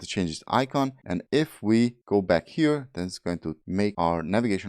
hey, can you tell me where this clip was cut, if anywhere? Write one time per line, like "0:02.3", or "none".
0:01.2
0:02.0
0:03.8